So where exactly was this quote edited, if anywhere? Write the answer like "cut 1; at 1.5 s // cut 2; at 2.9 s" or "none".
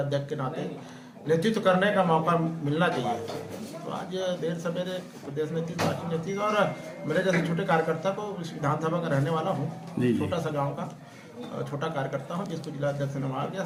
none